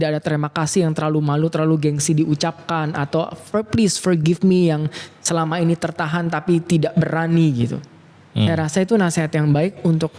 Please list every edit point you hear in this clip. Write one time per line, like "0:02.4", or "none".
none